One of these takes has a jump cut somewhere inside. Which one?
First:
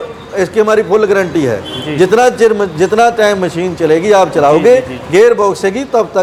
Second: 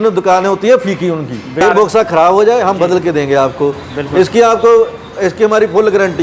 second; 1 cut; at 1.6 s

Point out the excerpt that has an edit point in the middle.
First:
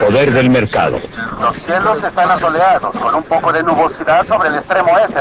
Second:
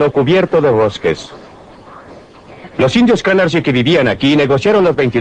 first; 1 cut; at 4.3 s

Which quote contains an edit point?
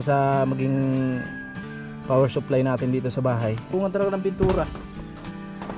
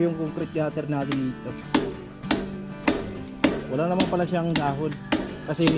first; 1 cut; at 3.6 s

